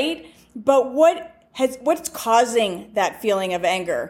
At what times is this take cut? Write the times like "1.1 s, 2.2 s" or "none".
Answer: none